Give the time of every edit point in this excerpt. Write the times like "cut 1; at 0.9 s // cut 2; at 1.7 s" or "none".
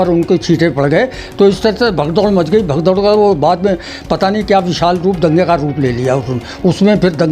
none